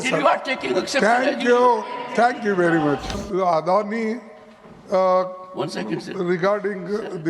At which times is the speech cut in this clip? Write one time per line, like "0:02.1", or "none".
0:03.2